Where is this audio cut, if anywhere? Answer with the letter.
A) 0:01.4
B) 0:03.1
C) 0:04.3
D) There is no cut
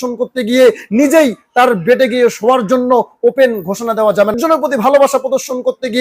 C